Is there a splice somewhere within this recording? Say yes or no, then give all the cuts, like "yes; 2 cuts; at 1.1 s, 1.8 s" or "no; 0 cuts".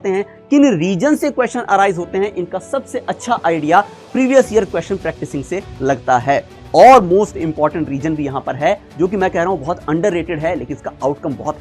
yes; 1 cut; at 6.6 s